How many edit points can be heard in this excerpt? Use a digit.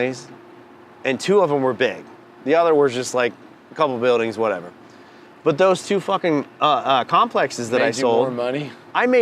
0